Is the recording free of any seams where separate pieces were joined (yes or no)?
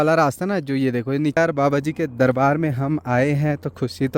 no